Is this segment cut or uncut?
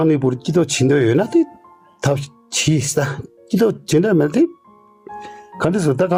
uncut